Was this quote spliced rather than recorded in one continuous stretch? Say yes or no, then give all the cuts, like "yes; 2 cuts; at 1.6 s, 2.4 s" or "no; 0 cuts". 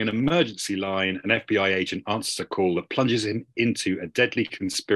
no; 0 cuts